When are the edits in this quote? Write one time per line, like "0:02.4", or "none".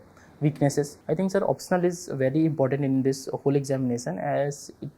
0:01.0